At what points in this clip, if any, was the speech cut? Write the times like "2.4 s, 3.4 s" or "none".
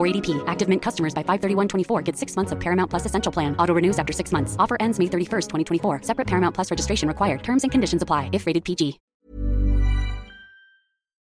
none